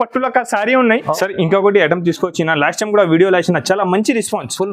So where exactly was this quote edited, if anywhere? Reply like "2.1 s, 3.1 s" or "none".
1.1 s